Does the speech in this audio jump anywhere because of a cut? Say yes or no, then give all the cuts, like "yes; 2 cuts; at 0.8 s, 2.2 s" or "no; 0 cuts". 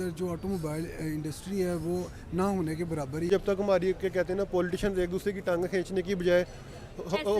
yes; 1 cut; at 3.3 s